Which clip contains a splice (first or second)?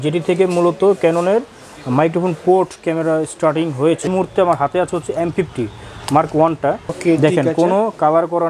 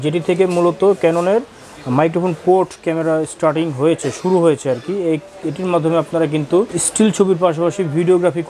first